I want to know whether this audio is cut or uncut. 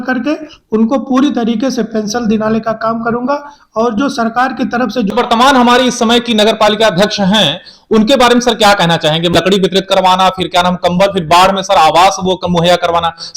cut